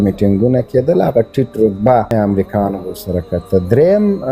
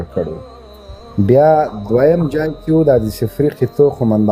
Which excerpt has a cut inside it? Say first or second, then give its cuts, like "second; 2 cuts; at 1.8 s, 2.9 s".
first; 1 cut; at 2.1 s